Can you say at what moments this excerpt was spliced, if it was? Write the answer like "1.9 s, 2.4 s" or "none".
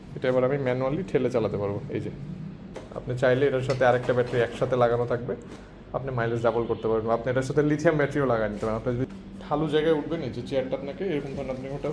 2.7 s, 9.1 s